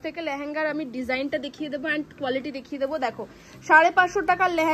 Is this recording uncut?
yes; 0 cuts

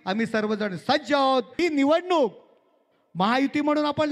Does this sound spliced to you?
yes; 1 cut; at 1.6 s

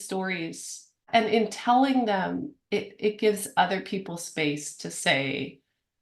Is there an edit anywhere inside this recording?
yes; 1 cut; at 1.1 s

